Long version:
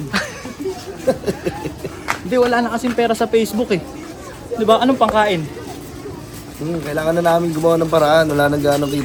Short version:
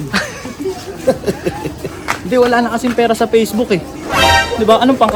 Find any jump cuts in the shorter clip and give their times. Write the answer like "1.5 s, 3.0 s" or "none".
none